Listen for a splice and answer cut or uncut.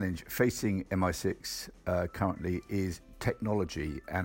uncut